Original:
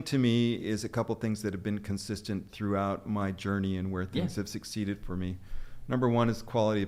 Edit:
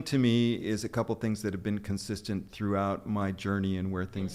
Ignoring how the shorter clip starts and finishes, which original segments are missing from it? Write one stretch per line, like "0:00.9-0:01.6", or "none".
none